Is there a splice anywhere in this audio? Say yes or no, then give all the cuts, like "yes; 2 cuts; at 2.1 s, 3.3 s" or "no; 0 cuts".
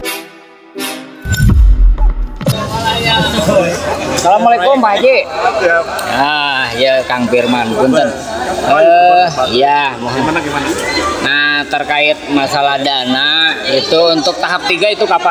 no; 0 cuts